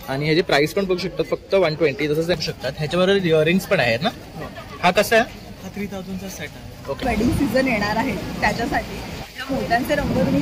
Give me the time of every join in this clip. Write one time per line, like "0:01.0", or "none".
0:02.4
0:07.0